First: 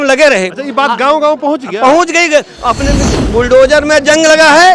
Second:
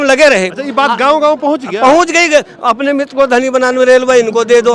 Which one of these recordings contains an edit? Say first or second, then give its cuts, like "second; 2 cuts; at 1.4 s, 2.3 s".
first; 1 cut; at 3.1 s